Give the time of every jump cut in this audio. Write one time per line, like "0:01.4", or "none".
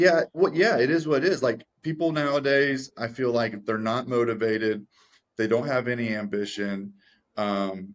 none